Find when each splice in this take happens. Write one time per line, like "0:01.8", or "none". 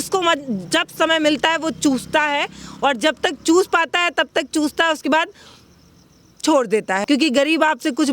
0:07.0